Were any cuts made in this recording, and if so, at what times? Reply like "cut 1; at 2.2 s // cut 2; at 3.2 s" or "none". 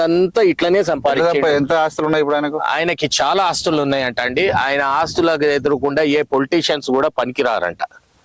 none